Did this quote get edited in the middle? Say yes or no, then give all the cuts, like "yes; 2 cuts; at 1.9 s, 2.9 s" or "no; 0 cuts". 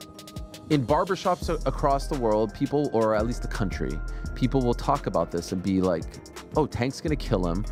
no; 0 cuts